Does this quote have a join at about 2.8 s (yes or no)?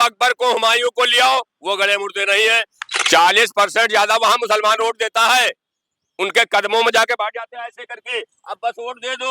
yes